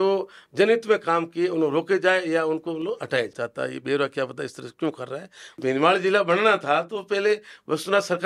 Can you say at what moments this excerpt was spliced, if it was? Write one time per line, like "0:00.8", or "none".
0:03.3
0:05.6